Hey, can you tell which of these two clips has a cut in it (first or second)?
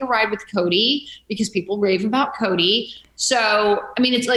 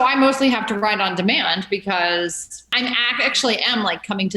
second